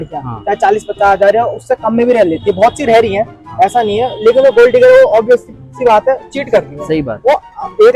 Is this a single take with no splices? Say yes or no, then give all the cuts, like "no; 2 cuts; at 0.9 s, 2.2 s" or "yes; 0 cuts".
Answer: yes; 0 cuts